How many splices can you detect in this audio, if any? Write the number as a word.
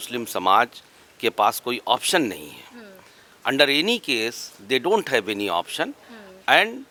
zero